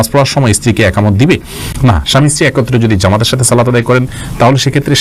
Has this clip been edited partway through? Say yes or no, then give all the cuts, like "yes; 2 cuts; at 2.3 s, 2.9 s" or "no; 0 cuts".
no; 0 cuts